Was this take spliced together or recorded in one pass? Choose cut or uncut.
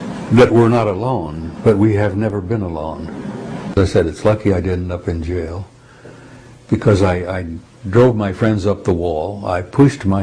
cut